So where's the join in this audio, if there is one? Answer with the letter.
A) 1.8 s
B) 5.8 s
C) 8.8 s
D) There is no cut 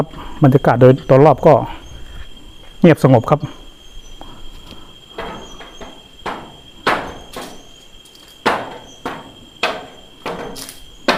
D